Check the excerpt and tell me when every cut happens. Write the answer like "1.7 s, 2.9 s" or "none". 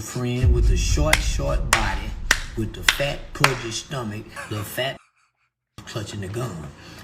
4.3 s